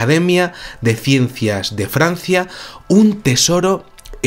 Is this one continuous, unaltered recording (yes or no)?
yes